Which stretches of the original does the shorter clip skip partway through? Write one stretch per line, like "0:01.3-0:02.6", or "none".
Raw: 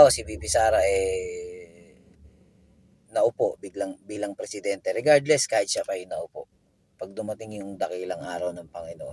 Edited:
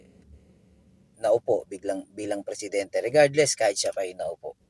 none